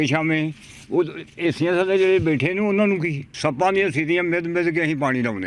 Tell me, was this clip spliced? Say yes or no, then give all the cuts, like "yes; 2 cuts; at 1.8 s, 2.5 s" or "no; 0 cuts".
yes; 1 cut; at 3.3 s